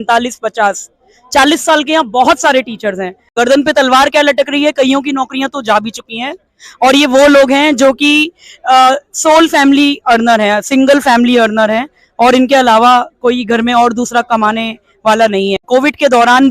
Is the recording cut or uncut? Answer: cut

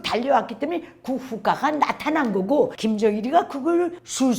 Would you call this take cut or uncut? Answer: cut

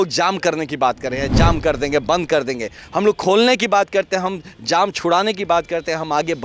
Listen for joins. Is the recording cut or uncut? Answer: uncut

